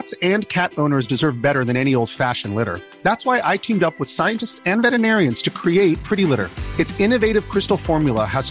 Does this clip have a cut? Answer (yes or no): no